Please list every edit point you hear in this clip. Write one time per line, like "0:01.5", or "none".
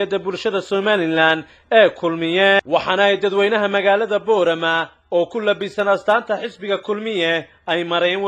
0:02.6